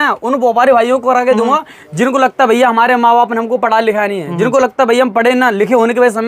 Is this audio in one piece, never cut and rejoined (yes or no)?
yes